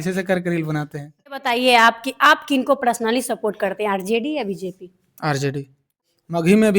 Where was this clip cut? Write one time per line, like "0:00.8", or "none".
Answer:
0:01.4
0:06.0